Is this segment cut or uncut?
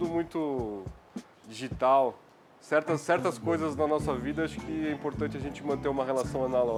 uncut